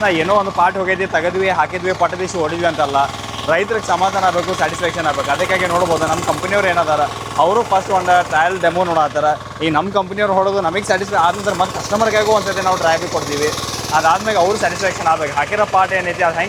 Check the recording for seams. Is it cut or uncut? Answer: uncut